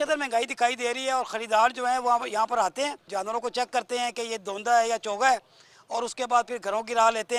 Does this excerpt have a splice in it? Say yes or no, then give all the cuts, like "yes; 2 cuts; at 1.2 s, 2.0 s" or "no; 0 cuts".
no; 0 cuts